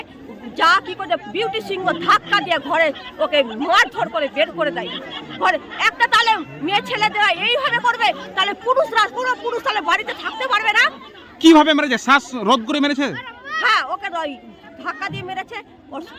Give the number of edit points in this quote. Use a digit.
0